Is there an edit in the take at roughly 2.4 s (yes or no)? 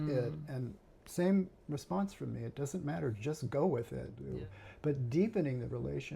no